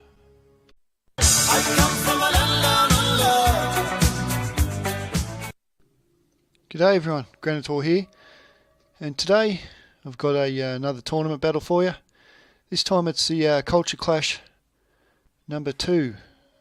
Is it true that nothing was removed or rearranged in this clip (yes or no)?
yes